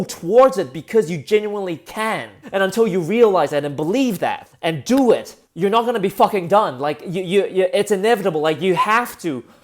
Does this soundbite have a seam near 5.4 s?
yes; 3 cuts; at 2.3 s, 4.5 s, 5.4 s

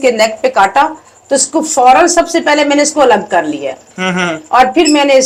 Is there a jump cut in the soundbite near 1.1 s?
no; 0 cuts

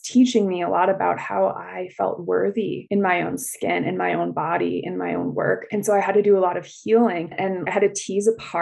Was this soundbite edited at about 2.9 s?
no; 1 cut; at 7.7 s

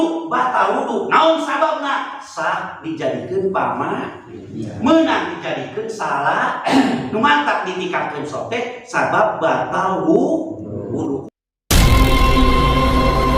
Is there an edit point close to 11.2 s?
yes; 1 cut; at 11.2 s

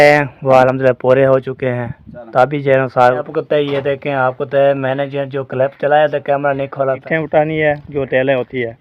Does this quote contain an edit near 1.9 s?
no; 2 cuts; at 3.2 s, 7.0 s

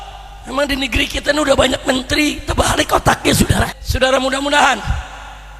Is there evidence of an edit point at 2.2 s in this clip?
no; 1 cut; at 3.8 s

